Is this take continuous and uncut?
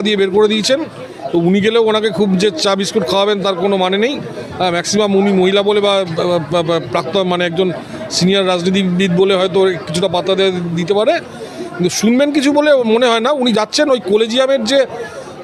yes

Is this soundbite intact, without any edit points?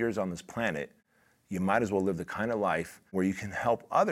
no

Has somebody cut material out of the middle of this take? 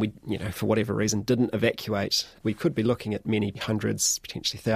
yes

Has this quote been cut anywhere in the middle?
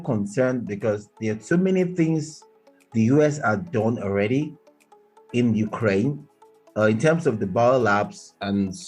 no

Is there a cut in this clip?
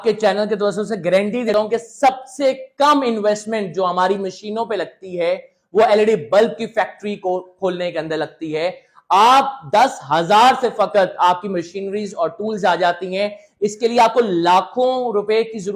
yes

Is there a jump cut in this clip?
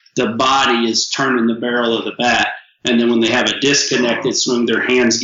no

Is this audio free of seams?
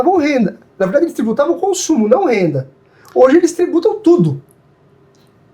yes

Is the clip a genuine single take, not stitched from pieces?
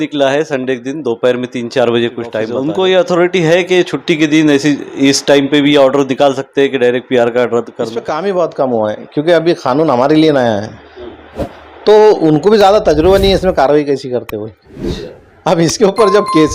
no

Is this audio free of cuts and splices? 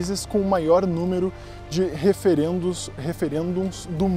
yes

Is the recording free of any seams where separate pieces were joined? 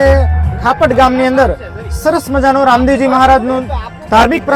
yes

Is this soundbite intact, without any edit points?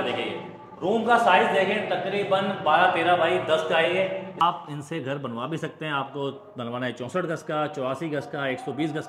no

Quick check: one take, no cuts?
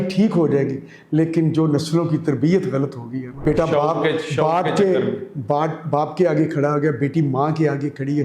no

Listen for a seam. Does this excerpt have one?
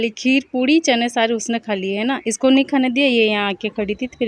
no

